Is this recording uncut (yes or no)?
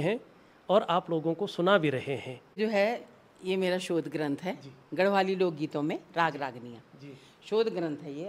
yes